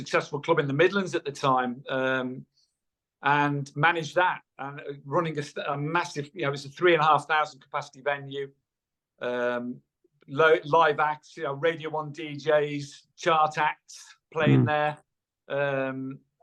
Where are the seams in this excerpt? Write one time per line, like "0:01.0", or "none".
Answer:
none